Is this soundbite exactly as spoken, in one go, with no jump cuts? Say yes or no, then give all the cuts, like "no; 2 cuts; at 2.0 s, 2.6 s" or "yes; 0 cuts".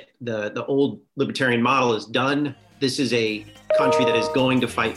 no; 2 cuts; at 1.0 s, 2.7 s